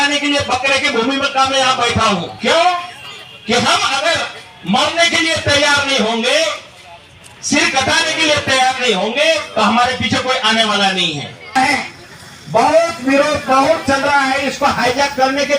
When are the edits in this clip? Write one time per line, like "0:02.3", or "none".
0:02.3
0:11.5